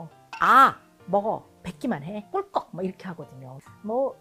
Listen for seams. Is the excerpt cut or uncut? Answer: uncut